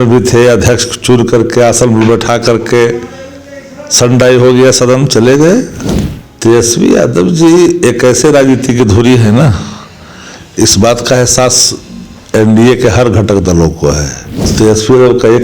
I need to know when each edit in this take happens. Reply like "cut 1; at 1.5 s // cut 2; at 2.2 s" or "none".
cut 1; at 5.8 s // cut 2; at 14.5 s